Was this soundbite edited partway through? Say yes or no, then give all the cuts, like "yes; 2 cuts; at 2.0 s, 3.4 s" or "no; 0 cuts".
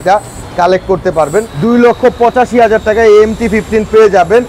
yes; 1 cut; at 1.5 s